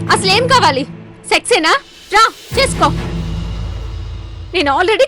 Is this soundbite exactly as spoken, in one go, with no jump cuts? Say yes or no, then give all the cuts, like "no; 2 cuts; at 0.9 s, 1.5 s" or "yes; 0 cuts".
yes; 0 cuts